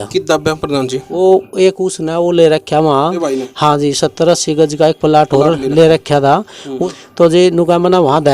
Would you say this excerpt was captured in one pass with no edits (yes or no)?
no